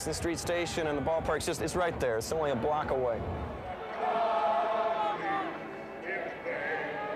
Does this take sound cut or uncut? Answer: cut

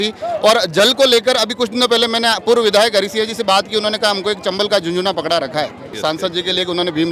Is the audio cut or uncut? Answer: cut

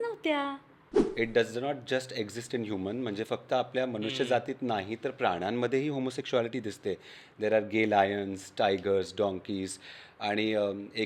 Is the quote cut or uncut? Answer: cut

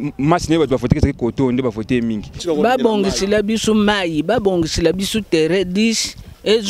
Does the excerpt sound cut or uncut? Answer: cut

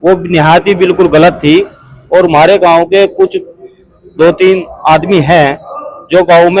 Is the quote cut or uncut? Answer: uncut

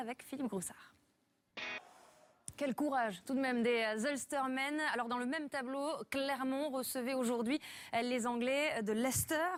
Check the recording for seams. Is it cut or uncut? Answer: uncut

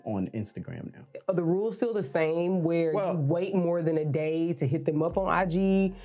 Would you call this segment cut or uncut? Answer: cut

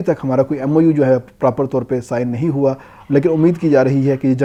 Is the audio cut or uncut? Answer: uncut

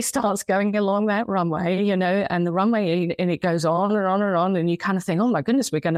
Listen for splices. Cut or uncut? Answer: uncut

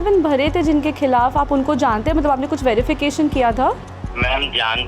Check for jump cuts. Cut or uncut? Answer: cut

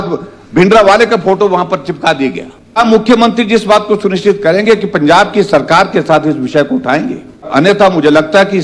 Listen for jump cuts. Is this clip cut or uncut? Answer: cut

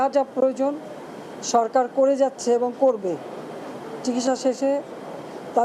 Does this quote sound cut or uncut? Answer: uncut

